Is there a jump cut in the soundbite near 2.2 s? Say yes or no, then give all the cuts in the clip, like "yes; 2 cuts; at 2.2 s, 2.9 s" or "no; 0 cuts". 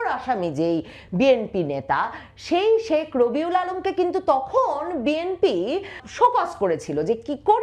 no; 1 cut; at 6.0 s